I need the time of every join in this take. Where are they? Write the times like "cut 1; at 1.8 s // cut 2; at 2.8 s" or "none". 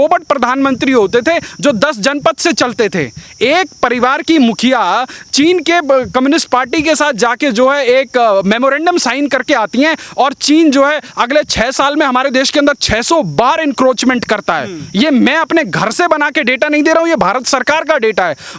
none

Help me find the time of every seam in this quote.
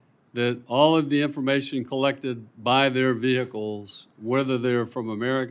none

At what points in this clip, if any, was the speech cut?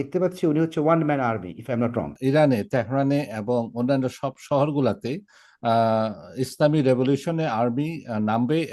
cut 1; at 2.1 s

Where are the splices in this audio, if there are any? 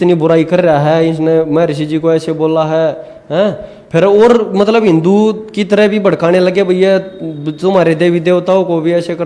none

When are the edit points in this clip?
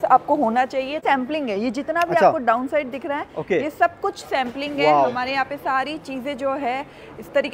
cut 1; at 1.0 s

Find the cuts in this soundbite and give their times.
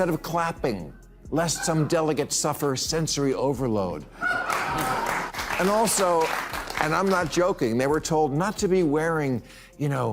cut 1; at 5.3 s

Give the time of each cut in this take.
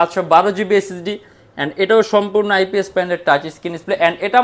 none

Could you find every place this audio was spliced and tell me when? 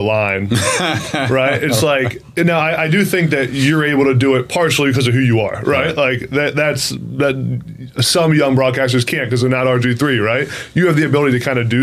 none

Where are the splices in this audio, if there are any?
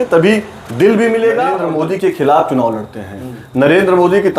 cut 1; at 1.7 s

